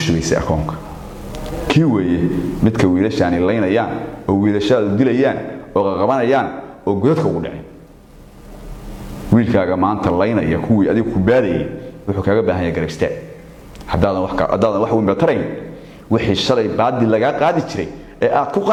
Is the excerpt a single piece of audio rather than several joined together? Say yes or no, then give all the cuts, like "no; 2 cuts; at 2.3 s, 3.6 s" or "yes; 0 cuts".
yes; 0 cuts